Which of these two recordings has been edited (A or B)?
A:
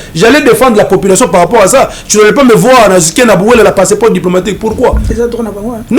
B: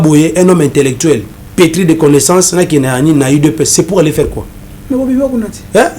B